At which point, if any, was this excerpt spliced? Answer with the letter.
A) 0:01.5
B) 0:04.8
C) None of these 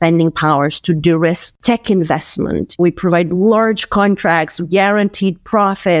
A